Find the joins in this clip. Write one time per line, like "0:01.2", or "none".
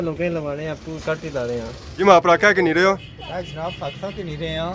0:02.0